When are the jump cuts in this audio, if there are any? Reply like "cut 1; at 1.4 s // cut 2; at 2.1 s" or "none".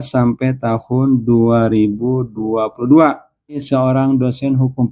cut 1; at 3.4 s

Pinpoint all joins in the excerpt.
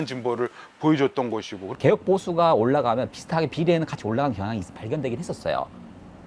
cut 1; at 1.7 s

